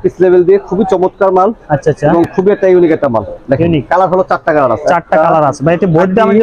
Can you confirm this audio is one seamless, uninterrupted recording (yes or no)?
yes